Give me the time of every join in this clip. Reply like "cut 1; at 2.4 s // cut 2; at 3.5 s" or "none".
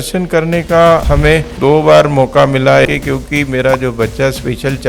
cut 1; at 1.0 s // cut 2; at 2.9 s